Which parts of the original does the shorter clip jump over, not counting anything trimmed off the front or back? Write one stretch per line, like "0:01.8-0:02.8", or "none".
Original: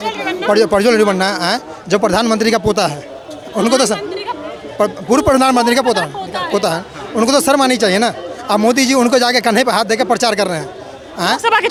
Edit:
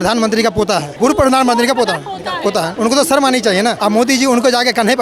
0:03.0-0:05.0
0:06.8-0:07.1
0:08.1-0:08.4

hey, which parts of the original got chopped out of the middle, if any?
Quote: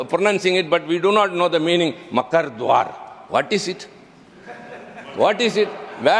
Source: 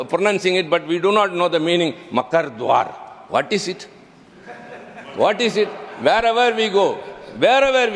none

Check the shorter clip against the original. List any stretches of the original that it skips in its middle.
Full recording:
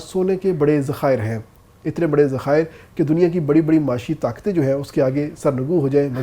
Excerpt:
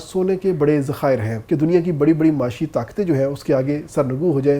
0:01.3-0:02.8

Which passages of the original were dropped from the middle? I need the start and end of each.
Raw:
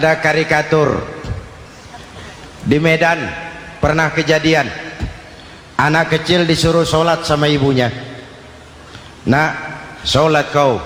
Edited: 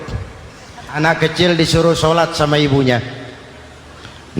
0:02.1-0:05.9

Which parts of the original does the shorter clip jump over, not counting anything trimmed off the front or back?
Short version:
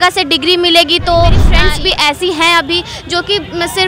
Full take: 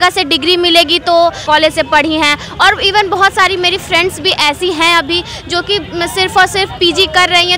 0:01.4-0:03.8

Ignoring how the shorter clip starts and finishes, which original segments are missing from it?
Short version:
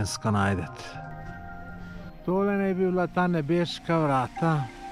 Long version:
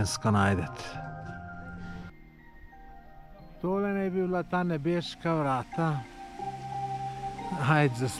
0:02.1-0:03.4

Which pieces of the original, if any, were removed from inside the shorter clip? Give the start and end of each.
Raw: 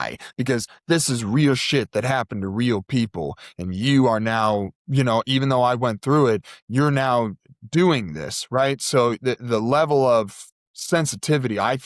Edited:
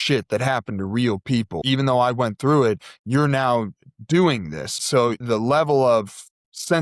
0:03.3-0:05.3
0:08.5-0:09.1

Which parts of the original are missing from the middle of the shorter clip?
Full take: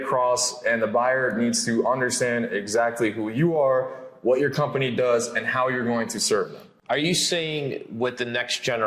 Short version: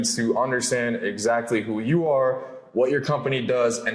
none

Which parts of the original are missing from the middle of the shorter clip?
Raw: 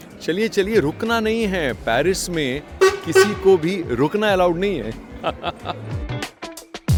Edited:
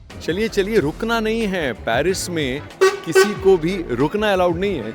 none

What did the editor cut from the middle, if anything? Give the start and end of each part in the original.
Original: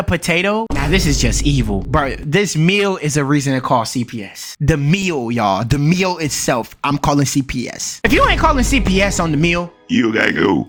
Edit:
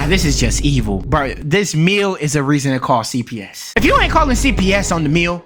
0:04.4-0:07.8

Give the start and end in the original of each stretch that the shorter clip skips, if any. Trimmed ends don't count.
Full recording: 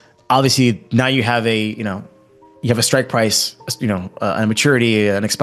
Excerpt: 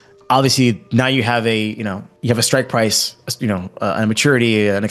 0:02.1-0:02.5

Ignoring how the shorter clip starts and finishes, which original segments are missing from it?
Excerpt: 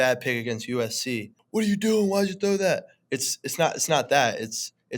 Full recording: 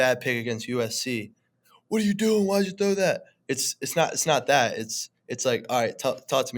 0:01.3-0:01.7

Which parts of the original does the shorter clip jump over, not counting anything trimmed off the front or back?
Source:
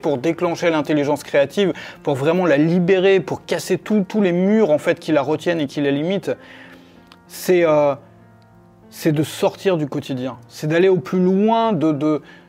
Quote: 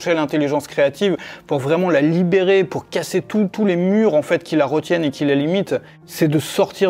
0:06.5-0:08.8

